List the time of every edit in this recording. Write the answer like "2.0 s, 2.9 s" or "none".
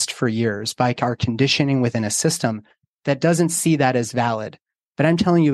none

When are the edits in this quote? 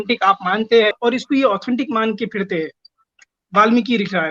1.0 s, 3.1 s

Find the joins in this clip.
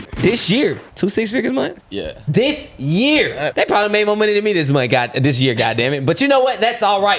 0.9 s, 1.9 s, 3.5 s

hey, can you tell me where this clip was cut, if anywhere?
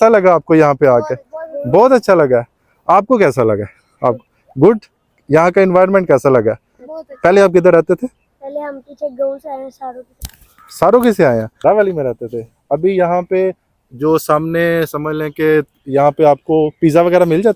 11.5 s

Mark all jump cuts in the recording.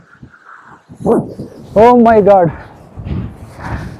1.4 s

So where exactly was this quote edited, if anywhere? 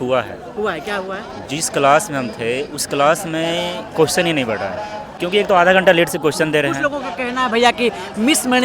5.1 s

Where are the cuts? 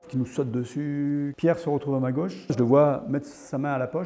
1.3 s, 2.5 s

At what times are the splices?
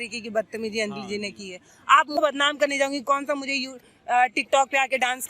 2.2 s

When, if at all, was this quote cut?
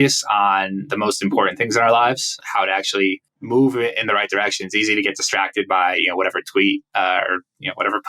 2.3 s, 3.3 s

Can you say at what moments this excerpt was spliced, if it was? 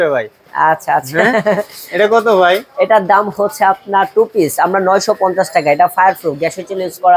none

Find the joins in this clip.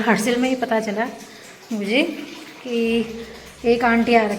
none

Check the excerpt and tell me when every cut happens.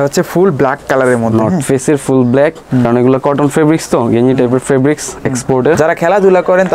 2.8 s, 5.8 s

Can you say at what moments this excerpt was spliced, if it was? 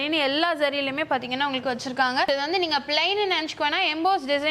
2.3 s

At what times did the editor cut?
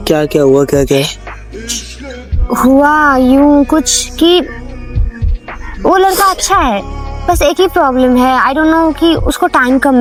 none

